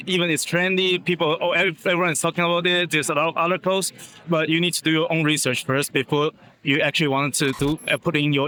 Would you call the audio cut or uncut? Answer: uncut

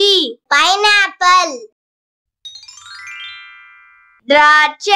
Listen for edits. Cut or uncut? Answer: cut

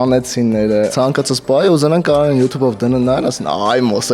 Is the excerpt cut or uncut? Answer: cut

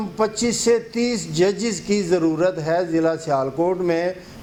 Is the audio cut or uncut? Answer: uncut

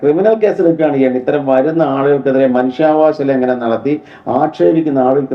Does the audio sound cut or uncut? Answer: uncut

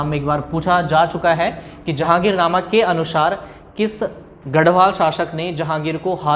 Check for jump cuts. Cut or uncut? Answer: cut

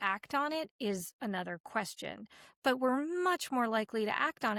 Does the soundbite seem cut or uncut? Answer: uncut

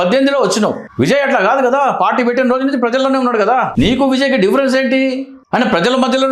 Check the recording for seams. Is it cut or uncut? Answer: cut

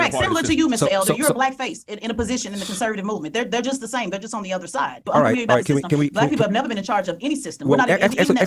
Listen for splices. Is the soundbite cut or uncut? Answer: cut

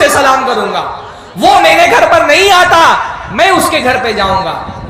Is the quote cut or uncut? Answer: uncut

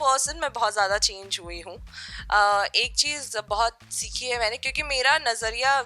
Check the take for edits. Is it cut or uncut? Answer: uncut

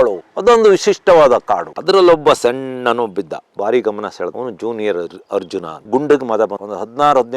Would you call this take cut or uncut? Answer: cut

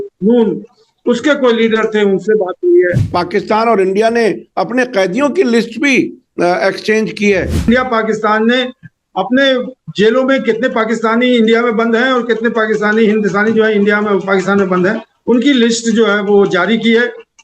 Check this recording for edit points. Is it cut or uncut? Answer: cut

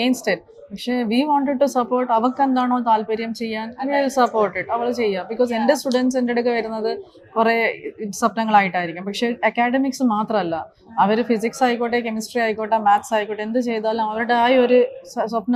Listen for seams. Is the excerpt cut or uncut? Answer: uncut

